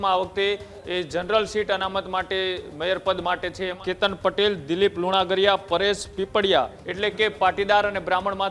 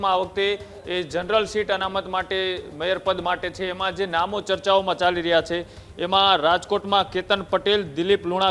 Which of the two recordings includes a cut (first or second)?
first